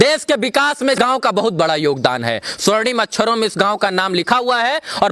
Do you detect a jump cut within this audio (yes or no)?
yes